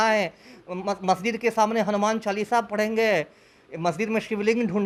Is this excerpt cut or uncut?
uncut